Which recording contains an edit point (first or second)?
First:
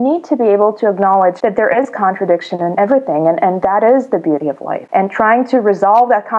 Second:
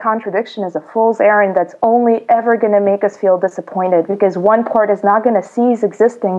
first